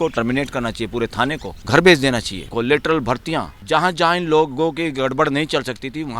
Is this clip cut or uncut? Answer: cut